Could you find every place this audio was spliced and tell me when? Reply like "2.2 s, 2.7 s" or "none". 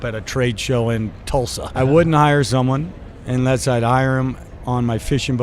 1.7 s

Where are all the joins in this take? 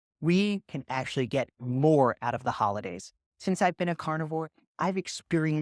none

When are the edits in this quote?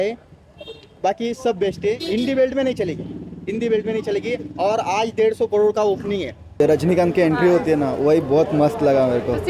6.6 s

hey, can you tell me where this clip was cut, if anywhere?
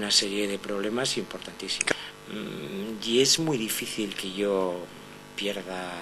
1.9 s

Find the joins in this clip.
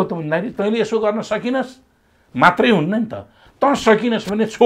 none

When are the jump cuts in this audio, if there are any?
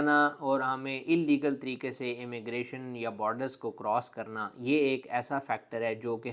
none

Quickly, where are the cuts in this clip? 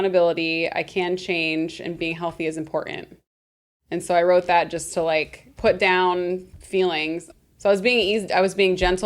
5.4 s, 6.5 s, 7.3 s

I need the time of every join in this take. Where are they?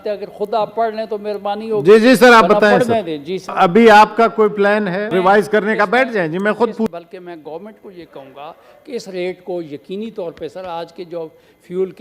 3.5 s, 5.1 s, 6.9 s

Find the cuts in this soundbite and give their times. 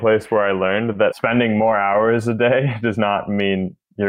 1.2 s

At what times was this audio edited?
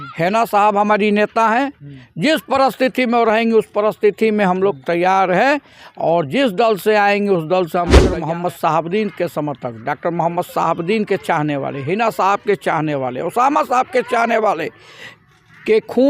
8.0 s

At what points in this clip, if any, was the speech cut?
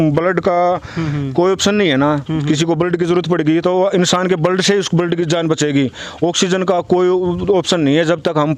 none

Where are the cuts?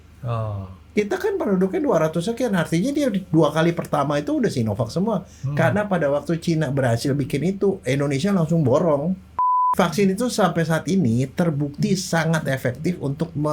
9.7 s

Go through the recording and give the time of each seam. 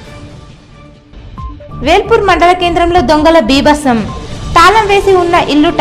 none

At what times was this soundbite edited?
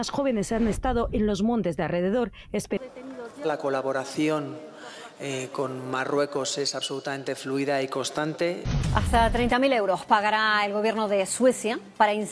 2.8 s, 8.7 s

